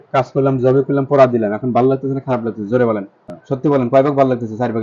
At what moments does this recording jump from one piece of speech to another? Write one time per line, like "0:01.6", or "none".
0:03.6